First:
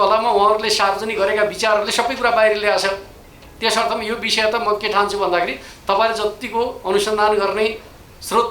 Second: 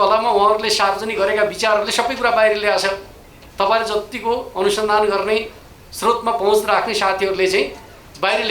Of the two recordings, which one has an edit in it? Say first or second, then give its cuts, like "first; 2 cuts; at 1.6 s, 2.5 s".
second; 1 cut; at 3.4 s